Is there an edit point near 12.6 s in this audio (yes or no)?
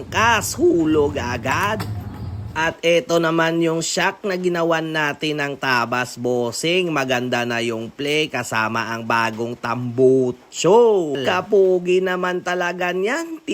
no